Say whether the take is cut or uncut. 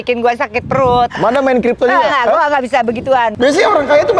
cut